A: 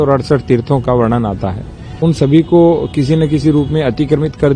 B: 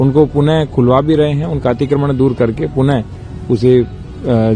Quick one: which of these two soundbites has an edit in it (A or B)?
A